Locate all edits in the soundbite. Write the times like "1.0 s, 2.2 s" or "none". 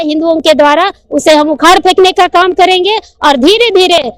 none